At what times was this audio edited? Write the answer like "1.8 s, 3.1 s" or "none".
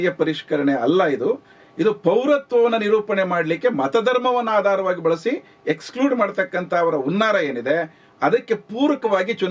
none